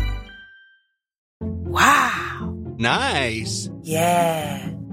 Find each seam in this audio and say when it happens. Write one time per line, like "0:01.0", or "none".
0:01.2